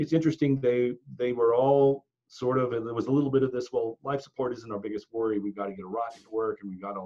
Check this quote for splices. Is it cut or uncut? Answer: uncut